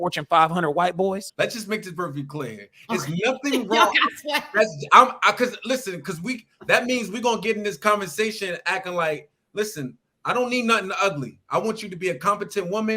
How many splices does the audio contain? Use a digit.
1